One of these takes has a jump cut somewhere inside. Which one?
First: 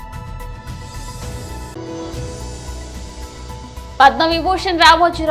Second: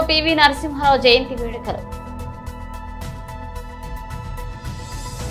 first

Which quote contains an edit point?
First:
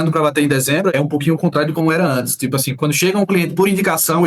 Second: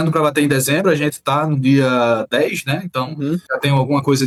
first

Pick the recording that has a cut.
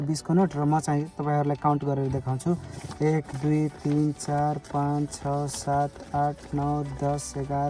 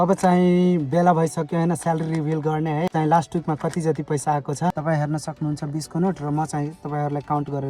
second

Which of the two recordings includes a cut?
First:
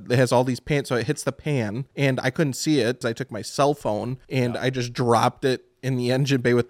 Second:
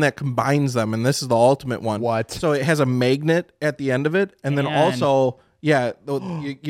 first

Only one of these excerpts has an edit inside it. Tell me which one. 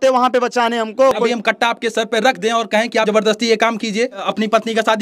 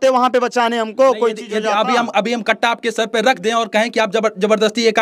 first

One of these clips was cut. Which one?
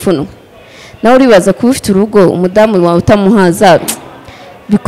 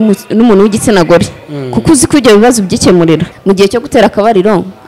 second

